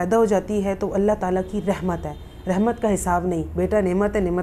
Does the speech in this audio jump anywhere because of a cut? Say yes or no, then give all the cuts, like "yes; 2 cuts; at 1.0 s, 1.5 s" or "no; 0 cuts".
no; 0 cuts